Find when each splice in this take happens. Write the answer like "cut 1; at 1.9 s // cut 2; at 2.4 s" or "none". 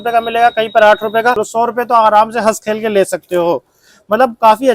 cut 1; at 1.4 s